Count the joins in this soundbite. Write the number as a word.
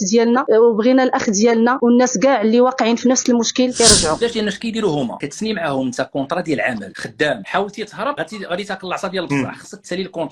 one